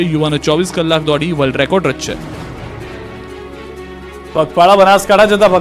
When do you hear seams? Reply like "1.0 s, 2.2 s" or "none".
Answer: 1.0 s

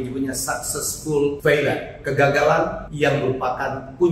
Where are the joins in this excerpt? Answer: 1.4 s, 2.8 s

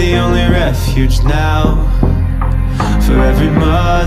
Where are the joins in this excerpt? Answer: none

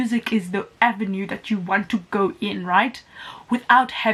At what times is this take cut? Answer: none

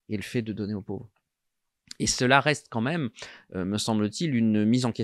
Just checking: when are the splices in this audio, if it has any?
none

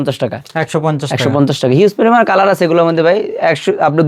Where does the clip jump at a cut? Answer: none

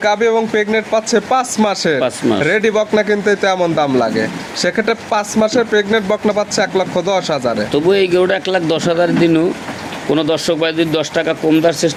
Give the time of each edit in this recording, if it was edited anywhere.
none

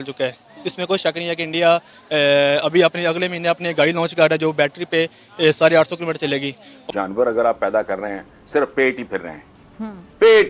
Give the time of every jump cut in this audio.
6.8 s

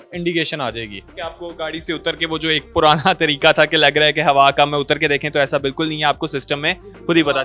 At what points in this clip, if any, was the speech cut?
none

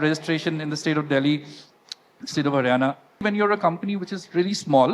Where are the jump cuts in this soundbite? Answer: 3.2 s

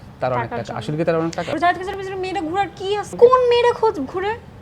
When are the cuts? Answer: 1.6 s, 3.1 s

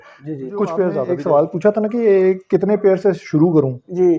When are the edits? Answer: 1.1 s

